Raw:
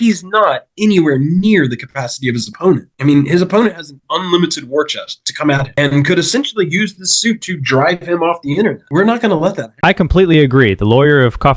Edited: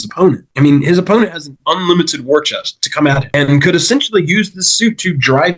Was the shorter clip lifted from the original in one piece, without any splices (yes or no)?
yes